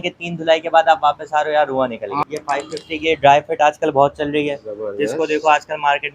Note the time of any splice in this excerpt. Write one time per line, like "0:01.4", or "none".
0:02.2